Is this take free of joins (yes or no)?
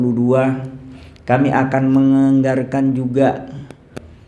yes